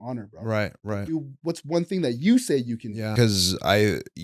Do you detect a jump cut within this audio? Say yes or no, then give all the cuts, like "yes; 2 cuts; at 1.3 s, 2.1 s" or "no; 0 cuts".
yes; 1 cut; at 3.1 s